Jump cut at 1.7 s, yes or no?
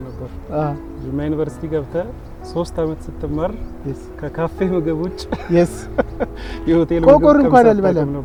no